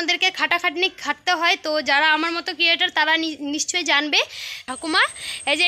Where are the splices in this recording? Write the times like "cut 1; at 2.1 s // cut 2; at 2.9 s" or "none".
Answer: cut 1; at 4.6 s